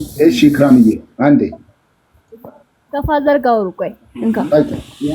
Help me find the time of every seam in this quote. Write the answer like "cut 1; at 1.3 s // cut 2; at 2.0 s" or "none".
none